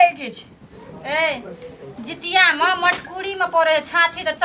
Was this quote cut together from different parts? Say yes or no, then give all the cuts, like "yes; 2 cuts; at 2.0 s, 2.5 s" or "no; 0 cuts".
no; 0 cuts